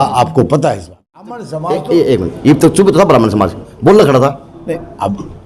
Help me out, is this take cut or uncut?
cut